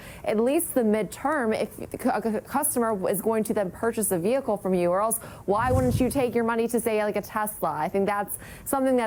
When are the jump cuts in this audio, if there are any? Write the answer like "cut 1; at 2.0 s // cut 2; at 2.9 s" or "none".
none

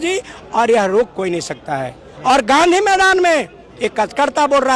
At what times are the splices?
none

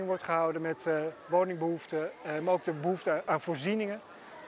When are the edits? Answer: cut 1; at 1.2 s // cut 2; at 3.2 s

